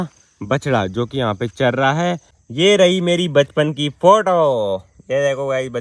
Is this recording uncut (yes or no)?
no